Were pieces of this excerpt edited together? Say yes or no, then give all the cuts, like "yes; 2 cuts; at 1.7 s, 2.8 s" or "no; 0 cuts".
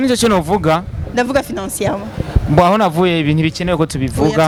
no; 0 cuts